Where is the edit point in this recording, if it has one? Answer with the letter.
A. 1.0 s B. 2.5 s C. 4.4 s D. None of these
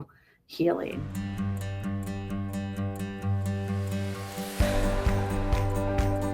A